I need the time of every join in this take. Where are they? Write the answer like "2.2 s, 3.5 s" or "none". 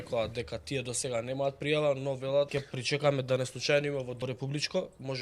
2.6 s, 4.2 s